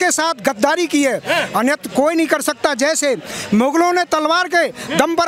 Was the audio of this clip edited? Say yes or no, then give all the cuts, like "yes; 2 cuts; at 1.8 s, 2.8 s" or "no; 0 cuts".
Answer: no; 0 cuts